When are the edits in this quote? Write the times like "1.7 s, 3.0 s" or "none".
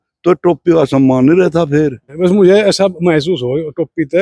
2.0 s

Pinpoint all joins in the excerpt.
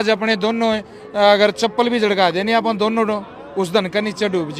none

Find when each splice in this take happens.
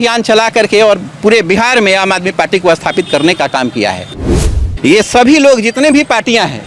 4.4 s

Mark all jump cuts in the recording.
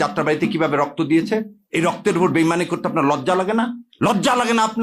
1.6 s, 3.8 s

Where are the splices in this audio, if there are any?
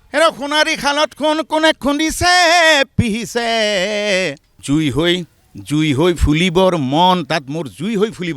4.5 s

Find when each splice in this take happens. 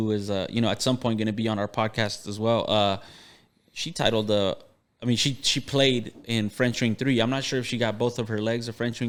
none

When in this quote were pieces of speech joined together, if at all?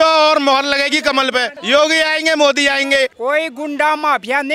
1.5 s, 3.1 s

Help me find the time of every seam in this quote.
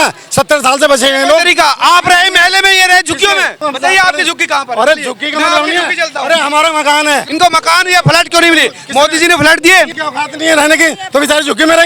3.6 s, 7.3 s, 10.0 s

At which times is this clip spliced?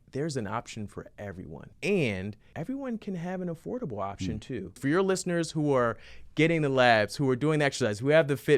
1.7 s, 2.4 s, 4.8 s

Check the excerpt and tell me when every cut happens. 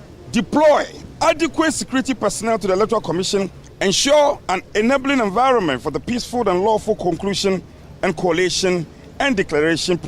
1.0 s, 3.6 s

